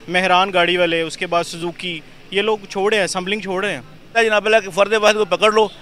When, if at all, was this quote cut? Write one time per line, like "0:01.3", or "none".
0:04.1